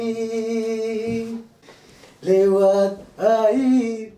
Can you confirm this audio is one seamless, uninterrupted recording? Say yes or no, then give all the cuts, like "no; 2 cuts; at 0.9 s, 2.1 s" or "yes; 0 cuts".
no; 1 cut; at 1.5 s